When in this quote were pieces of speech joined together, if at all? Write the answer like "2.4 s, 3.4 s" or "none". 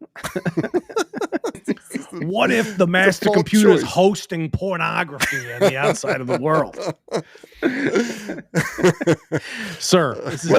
1.6 s